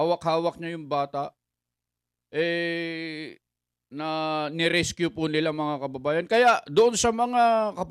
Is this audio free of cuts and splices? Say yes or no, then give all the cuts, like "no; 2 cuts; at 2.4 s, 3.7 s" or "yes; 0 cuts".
yes; 0 cuts